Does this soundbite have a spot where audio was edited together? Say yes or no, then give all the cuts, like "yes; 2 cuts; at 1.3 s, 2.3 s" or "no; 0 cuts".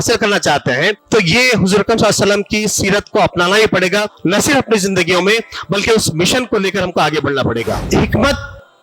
yes; 3 cuts; at 1.0 s, 4.1 s, 7.8 s